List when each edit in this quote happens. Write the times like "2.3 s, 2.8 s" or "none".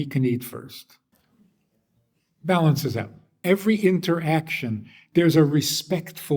1.1 s, 3.3 s